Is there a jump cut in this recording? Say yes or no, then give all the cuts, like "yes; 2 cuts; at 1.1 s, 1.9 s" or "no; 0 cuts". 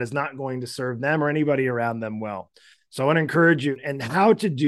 yes; 1 cut; at 3.7 s